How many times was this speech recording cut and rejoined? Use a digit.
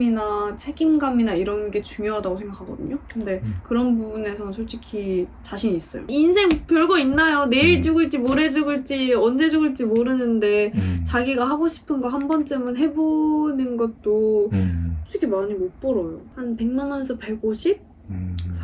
3